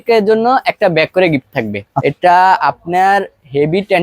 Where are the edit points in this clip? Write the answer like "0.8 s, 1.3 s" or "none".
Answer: 1.8 s